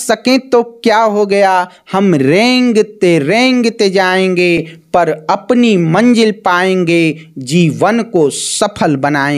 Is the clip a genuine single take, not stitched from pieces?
yes; 0 cuts

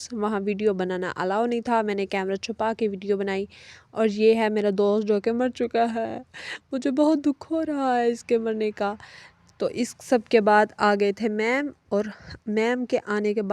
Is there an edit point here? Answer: no; 0 cuts

